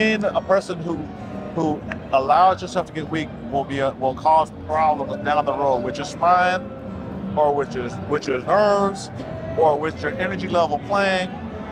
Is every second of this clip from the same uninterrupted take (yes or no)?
yes